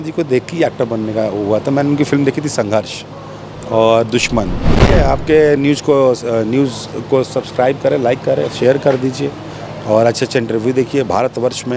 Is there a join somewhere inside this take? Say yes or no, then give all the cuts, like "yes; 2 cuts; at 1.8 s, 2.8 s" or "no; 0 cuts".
yes; 1 cut; at 4.9 s